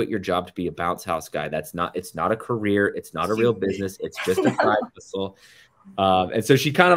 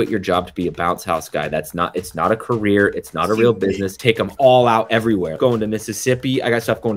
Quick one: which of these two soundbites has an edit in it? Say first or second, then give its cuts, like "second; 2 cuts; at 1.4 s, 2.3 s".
second; 2 cuts; at 3.9 s, 5.4 s